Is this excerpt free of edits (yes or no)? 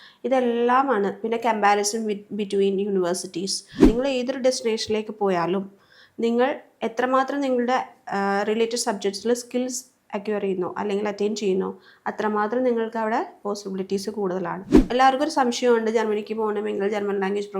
no